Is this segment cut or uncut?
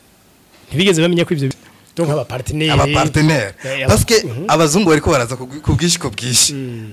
cut